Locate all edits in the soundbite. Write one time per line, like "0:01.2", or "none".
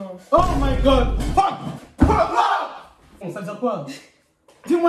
0:01.8
0:03.2